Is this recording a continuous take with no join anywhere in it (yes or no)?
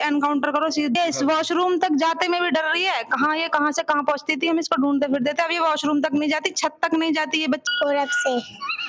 no